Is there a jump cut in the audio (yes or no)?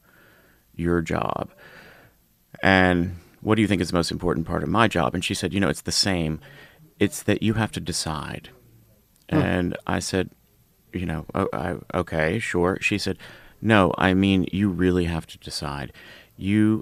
no